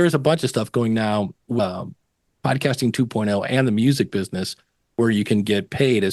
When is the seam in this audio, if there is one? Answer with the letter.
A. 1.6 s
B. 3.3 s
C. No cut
A